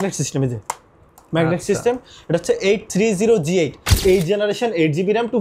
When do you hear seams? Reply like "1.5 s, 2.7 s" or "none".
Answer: 4.0 s